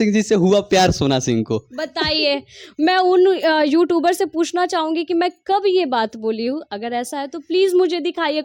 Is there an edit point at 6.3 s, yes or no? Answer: no